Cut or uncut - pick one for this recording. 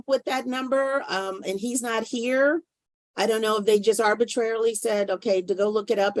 uncut